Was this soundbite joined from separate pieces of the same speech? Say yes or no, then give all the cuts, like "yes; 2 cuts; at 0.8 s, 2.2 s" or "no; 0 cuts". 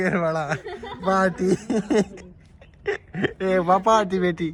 no; 0 cuts